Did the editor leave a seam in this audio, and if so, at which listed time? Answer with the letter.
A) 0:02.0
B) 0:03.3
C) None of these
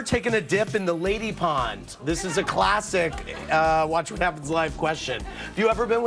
C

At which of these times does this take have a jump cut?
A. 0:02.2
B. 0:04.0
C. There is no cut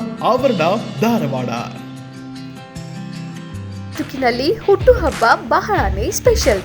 B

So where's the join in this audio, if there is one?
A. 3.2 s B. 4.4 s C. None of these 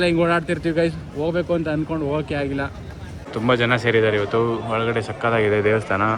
A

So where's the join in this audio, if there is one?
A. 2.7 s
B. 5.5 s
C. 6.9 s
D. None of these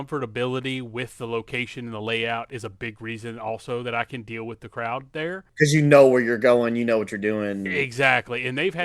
B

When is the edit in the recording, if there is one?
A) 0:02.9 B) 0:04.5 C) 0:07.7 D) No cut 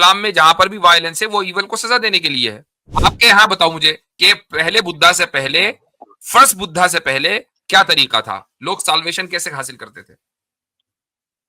A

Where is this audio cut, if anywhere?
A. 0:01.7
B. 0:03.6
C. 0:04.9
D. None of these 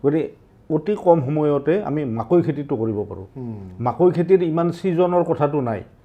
D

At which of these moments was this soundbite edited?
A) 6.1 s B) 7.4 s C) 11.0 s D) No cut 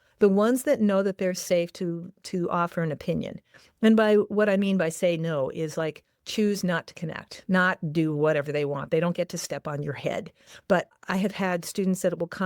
C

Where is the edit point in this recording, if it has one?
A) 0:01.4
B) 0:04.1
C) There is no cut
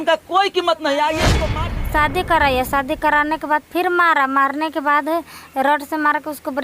A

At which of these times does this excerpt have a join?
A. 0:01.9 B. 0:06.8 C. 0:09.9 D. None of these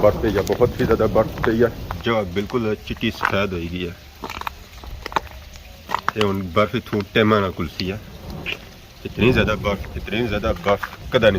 A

